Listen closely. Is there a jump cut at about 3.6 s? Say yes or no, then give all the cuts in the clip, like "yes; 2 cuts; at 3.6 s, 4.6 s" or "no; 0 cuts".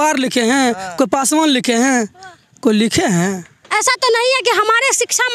yes; 1 cut; at 3.6 s